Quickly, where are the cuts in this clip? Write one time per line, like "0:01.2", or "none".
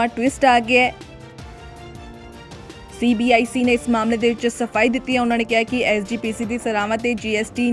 none